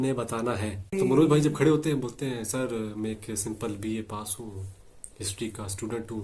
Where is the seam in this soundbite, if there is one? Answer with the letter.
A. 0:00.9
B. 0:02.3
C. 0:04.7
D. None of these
A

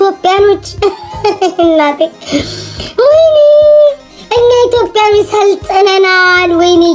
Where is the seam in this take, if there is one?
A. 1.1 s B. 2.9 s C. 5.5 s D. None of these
D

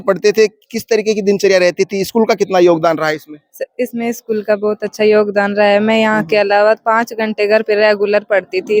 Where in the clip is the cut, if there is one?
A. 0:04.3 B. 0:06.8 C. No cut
C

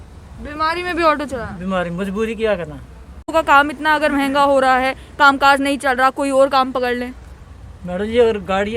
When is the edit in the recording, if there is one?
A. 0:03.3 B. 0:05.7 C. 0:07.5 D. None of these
A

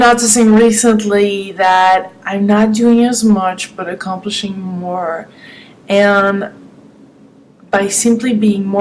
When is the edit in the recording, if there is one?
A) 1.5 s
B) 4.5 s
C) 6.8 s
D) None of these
A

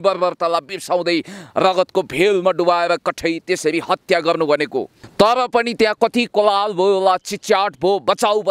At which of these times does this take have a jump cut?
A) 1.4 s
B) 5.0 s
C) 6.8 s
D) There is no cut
B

